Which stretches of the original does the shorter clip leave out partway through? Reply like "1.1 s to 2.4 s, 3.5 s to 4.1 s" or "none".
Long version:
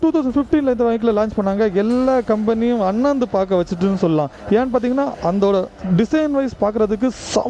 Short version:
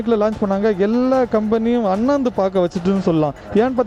none